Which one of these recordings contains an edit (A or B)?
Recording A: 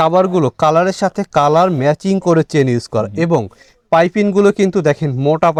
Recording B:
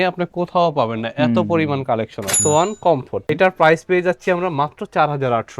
B